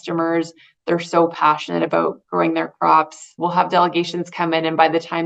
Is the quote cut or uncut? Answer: cut